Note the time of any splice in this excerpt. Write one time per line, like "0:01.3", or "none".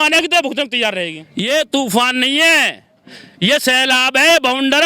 0:01.2